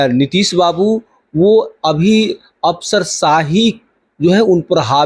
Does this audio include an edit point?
no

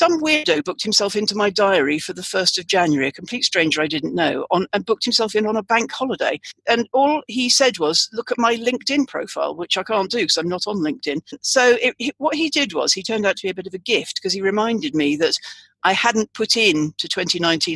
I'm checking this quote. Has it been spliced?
yes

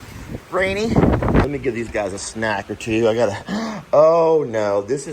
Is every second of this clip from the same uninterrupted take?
no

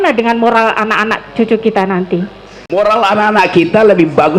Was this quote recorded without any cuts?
yes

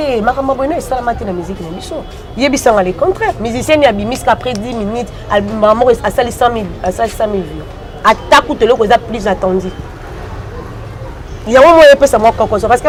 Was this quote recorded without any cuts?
yes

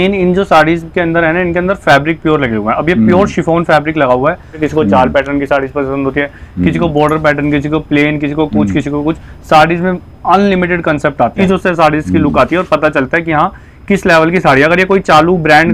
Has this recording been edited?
yes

